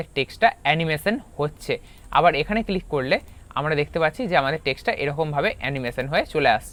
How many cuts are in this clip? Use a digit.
0